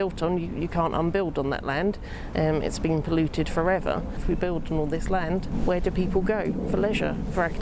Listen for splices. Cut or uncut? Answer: cut